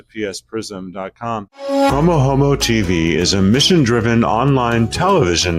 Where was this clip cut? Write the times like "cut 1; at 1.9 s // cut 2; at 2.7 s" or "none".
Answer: cut 1; at 1.9 s